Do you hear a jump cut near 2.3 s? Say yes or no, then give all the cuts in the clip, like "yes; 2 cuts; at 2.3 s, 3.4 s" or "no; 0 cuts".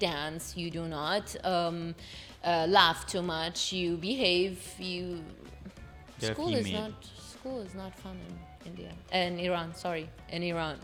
no; 0 cuts